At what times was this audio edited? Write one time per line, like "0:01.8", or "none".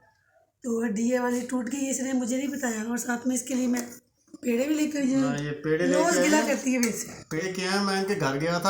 0:07.4